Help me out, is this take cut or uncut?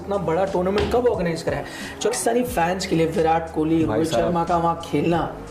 cut